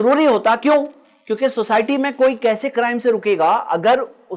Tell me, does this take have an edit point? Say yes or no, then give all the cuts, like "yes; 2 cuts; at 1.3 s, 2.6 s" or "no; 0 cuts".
no; 0 cuts